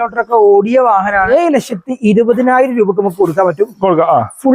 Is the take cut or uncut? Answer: cut